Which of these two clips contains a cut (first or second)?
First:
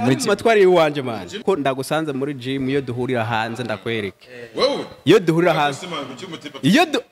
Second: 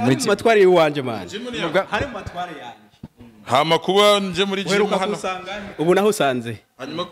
first